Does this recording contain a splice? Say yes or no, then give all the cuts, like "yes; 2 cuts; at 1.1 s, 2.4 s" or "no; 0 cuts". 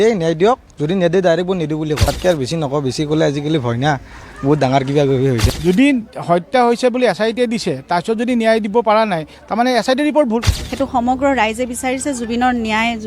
yes; 3 cuts; at 2.1 s, 5.4 s, 10.6 s